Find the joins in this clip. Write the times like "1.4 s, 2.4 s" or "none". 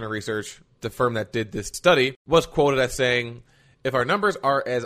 2.2 s